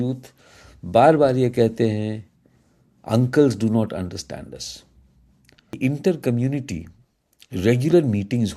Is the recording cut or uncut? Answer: cut